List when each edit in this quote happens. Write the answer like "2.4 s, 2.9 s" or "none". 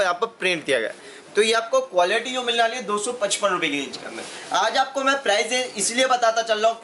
none